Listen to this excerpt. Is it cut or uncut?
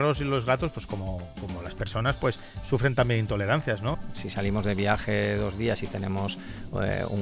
cut